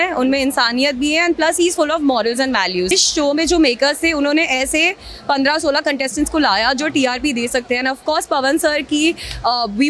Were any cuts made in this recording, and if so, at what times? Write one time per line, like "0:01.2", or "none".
0:02.9